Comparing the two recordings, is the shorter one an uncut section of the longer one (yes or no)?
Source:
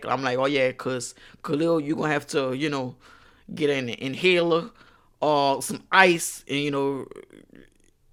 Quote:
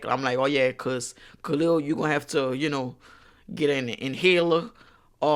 yes